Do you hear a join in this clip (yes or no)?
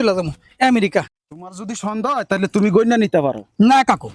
yes